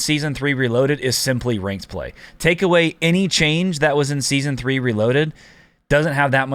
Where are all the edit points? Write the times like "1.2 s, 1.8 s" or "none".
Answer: none